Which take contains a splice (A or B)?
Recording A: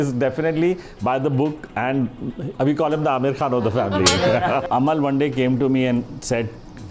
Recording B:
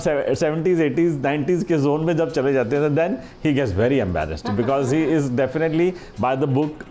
A